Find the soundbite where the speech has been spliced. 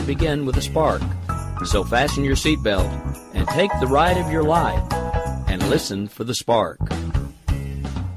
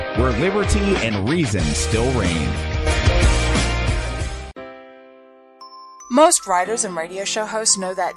second; 1 cut; at 4.5 s

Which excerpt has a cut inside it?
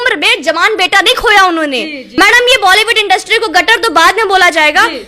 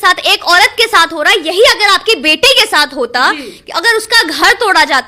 first; 1 cut; at 2.1 s

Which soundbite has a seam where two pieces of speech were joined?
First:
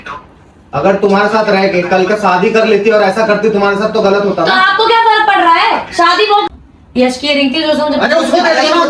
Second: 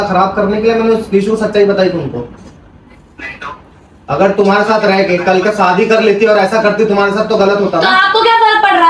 first; 1 cut; at 6.5 s

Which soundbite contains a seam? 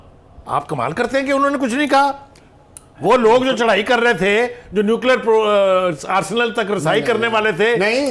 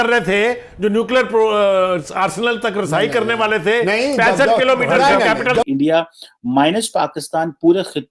second; 1 cut; at 5.6 s

